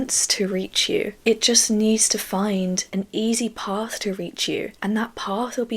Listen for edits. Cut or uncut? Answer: cut